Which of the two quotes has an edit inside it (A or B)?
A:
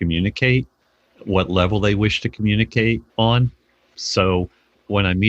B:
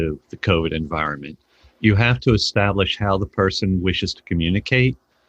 A